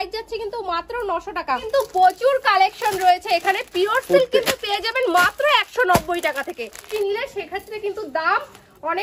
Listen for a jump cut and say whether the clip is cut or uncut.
cut